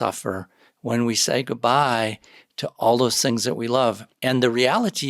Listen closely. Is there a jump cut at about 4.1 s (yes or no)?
yes